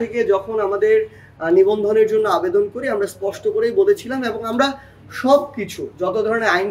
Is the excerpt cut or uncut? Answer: uncut